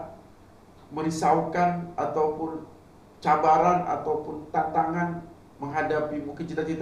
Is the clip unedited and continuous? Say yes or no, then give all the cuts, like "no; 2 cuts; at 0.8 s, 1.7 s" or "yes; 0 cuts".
yes; 0 cuts